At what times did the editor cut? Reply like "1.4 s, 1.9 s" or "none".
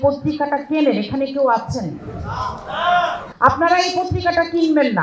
3.3 s